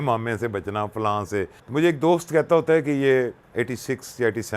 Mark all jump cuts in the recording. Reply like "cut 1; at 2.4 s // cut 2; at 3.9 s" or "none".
cut 1; at 1.6 s // cut 2; at 3.4 s